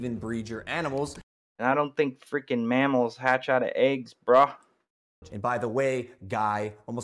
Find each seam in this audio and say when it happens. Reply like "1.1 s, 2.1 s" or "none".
none